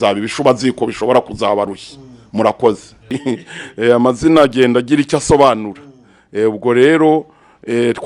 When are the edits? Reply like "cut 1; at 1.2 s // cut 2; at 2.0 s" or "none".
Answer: cut 1; at 2.9 s